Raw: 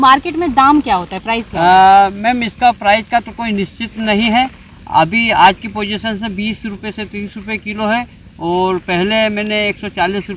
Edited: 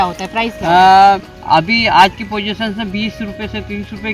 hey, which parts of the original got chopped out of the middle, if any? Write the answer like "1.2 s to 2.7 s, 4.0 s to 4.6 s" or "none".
2.2 s to 4.7 s